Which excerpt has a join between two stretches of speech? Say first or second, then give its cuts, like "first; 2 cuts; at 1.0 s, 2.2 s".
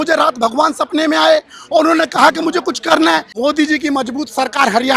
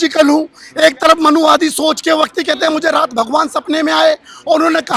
first; 1 cut; at 3.3 s